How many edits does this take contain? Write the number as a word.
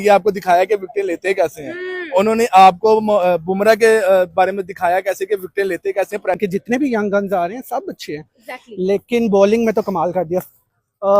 one